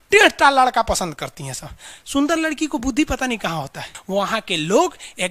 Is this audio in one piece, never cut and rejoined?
no; 1 cut; at 3.9 s

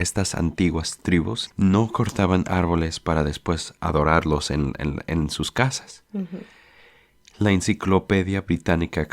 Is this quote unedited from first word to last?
no; 2 cuts; at 1.4 s, 3.7 s

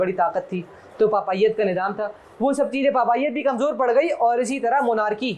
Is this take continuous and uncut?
yes; 0 cuts

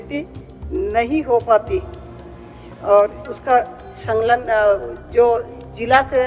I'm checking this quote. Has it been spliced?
no; 0 cuts

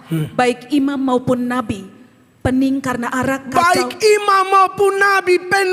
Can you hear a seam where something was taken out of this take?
no; 0 cuts

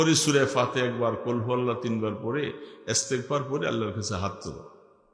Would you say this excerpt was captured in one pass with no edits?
yes; 0 cuts

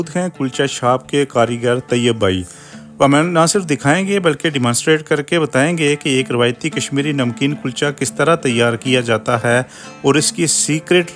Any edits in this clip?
no; 0 cuts

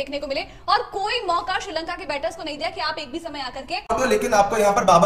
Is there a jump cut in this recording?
yes; 1 cut; at 3.9 s

